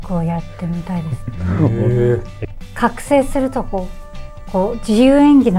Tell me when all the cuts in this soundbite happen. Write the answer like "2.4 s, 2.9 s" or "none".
2.3 s